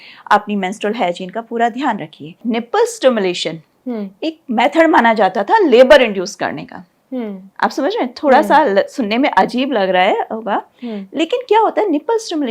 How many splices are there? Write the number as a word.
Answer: one